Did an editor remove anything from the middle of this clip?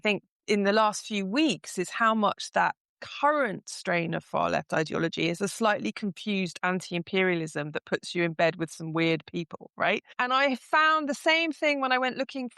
yes; 1 cut; at 10.1 s

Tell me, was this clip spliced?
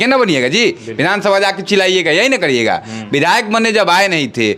no; 0 cuts

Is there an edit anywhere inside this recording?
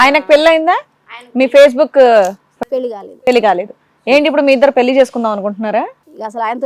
no; 0 cuts

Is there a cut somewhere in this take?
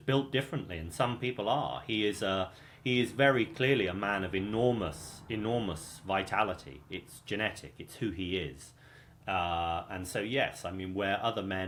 no; 0 cuts

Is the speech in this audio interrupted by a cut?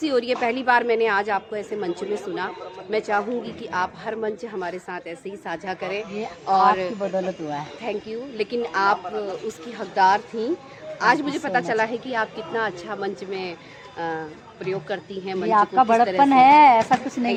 no; 0 cuts

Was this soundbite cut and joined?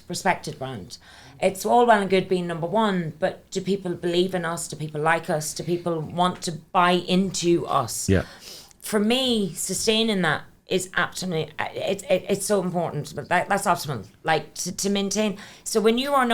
no; 0 cuts

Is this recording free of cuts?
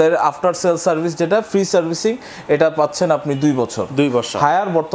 yes; 0 cuts

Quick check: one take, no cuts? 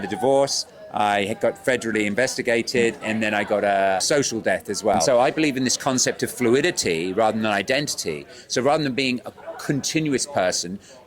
no; 3 cuts; at 3.0 s, 4.0 s, 5.0 s

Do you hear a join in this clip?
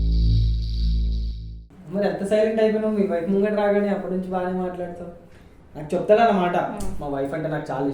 yes; 1 cut; at 1.6 s

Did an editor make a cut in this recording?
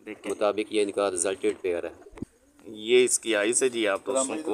yes; 1 cut; at 2.1 s

